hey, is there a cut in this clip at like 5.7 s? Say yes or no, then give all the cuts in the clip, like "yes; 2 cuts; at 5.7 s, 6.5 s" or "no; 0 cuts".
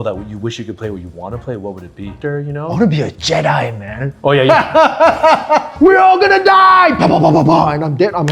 yes; 2 cuts; at 2.2 s, 5.7 s